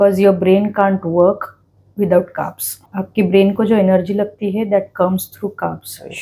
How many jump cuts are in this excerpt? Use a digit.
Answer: 1